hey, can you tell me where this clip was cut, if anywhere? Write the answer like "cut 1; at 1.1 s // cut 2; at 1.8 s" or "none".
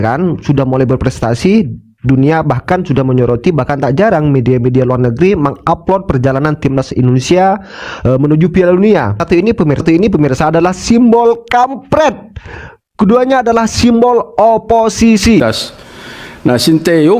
cut 1; at 9.2 s // cut 2; at 15.4 s